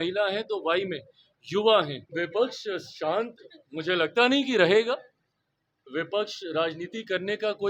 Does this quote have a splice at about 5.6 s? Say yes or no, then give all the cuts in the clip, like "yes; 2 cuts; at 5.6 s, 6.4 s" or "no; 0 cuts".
no; 1 cut; at 2.0 s